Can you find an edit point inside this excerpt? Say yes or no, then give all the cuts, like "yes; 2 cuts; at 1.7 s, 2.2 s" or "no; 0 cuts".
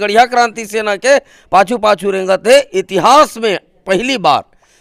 no; 0 cuts